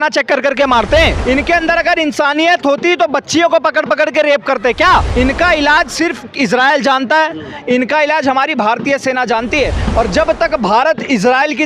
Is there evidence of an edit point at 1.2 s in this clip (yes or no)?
yes